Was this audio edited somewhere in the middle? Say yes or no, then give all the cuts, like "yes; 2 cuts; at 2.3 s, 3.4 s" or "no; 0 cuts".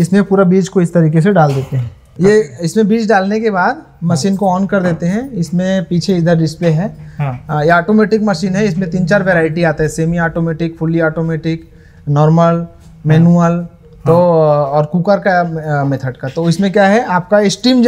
no; 0 cuts